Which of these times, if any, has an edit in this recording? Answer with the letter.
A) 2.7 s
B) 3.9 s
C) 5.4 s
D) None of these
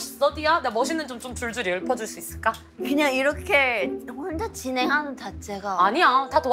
A